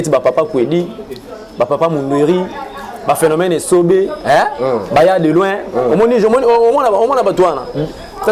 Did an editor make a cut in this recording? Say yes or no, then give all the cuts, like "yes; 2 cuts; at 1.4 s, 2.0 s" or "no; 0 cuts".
no; 0 cuts